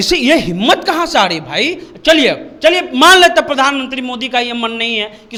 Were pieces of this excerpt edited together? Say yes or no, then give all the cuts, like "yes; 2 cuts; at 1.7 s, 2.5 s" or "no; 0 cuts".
no; 0 cuts